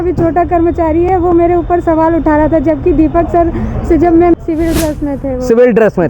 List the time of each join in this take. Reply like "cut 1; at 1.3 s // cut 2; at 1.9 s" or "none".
cut 1; at 4.3 s